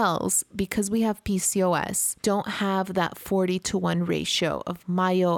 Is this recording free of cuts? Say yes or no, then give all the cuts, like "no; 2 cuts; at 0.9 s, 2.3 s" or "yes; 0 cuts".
yes; 0 cuts